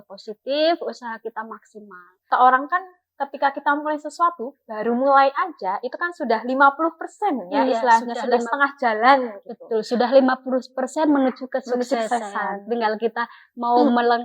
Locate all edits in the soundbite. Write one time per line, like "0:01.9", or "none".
0:02.3